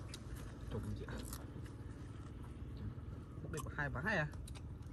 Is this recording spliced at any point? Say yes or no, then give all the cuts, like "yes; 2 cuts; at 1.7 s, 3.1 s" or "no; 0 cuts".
no; 0 cuts